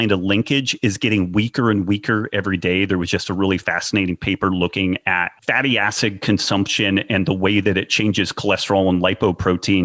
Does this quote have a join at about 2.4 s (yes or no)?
no